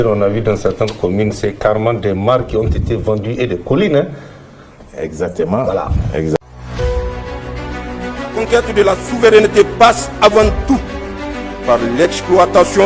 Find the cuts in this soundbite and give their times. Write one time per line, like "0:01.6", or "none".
0:06.4